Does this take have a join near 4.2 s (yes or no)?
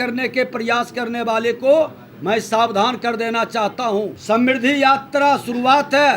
yes